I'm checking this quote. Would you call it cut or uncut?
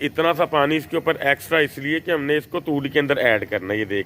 uncut